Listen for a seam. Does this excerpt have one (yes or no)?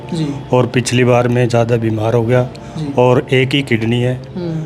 no